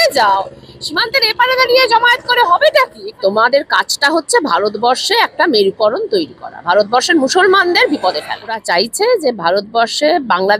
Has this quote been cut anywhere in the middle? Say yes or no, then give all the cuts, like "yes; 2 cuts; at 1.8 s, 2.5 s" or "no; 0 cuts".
yes; 2 cuts; at 3.0 s, 8.6 s